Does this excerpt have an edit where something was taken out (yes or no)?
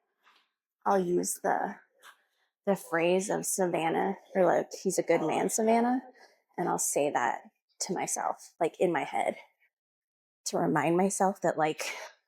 yes